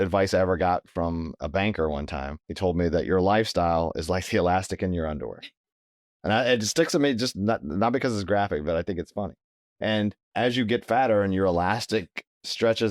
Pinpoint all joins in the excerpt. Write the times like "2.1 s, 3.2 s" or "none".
1.4 s, 2.4 s, 10.2 s